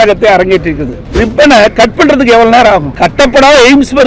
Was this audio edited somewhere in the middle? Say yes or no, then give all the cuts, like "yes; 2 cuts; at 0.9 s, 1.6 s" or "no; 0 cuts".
yes; 2 cuts; at 1.2 s, 2.9 s